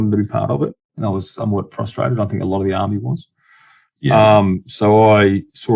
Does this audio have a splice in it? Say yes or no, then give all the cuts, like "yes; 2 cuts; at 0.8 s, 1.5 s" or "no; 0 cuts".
yes; 1 cut; at 0.9 s